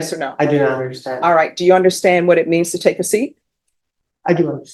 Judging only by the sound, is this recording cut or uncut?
uncut